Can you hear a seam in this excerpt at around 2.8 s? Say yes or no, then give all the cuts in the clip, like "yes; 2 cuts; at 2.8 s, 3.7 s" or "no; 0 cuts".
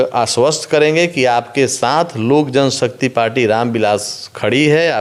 no; 0 cuts